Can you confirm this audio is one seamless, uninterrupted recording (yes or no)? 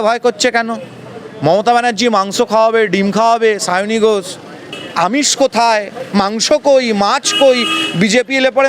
no